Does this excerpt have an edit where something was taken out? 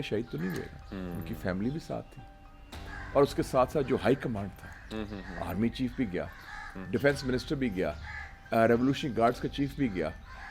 no; 0 cuts

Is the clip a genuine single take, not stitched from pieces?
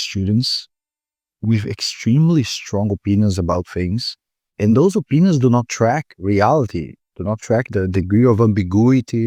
yes; 0 cuts

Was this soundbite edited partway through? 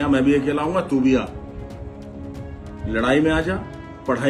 no; 0 cuts

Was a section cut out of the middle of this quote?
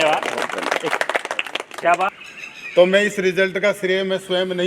yes; 1 cut; at 2.1 s

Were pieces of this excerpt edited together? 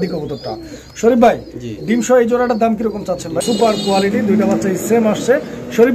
yes; 1 cut; at 3.4 s

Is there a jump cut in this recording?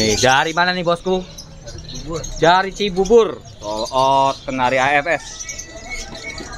no; 0 cuts

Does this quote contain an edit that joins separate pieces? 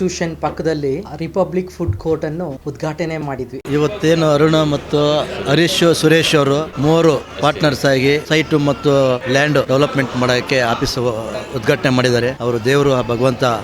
yes; 5 cuts; at 1.1 s, 2.6 s, 3.6 s, 9.7 s, 12.4 s

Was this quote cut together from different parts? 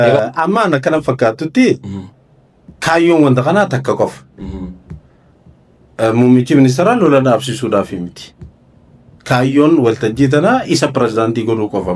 no; 0 cuts

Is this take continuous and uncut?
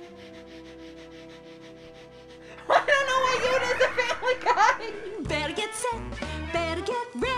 no; 1 cut; at 5.0 s

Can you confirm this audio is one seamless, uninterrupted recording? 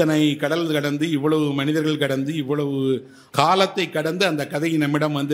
no; 1 cut; at 3.2 s

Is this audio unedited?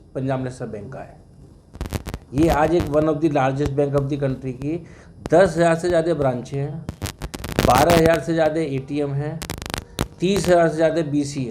yes; 0 cuts

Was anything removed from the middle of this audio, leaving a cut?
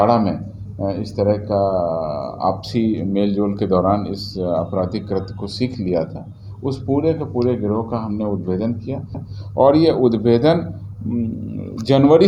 no; 0 cuts

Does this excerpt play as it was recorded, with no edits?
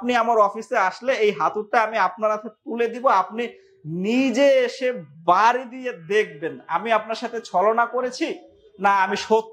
yes; 0 cuts

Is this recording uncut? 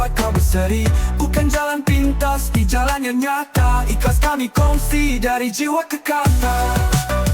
yes; 0 cuts

